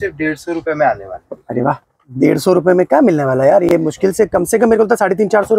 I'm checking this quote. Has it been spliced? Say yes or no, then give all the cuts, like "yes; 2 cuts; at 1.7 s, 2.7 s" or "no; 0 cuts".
no; 0 cuts